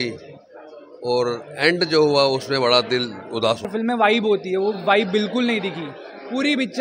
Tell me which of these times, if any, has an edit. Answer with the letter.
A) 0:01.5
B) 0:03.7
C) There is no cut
B